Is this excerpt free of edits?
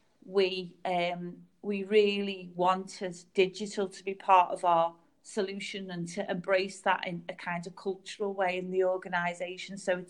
yes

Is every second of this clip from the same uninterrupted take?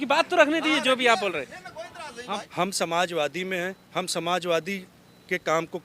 no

